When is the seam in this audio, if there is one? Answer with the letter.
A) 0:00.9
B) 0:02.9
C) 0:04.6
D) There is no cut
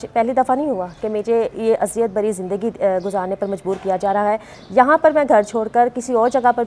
D